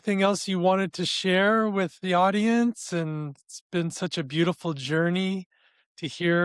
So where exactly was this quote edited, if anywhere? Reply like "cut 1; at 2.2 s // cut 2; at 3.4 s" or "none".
none

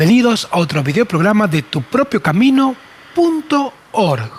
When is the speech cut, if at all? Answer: none

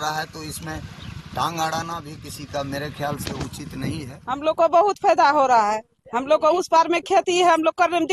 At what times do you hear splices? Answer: cut 1; at 4.2 s

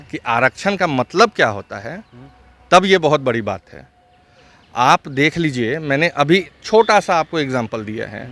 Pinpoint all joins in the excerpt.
none

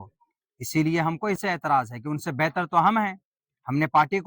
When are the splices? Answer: cut 1; at 1.4 s

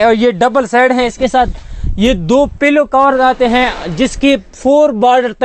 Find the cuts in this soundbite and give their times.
none

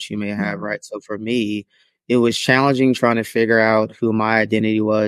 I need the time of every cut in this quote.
none

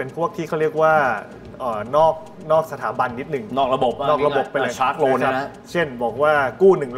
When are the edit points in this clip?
none

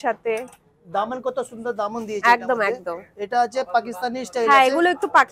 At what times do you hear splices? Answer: none

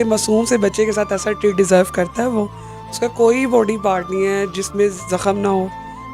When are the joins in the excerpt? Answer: none

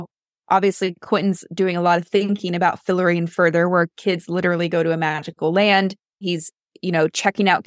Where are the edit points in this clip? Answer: cut 1; at 6.3 s

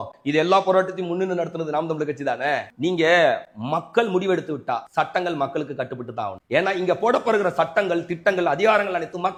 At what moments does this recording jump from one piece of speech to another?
none

